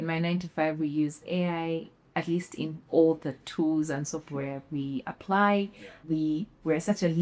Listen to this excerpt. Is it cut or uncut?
uncut